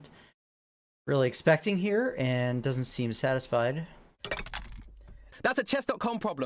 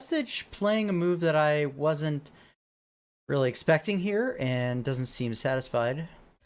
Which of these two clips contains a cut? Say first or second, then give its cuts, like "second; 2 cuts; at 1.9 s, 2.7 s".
first; 1 cut; at 5.3 s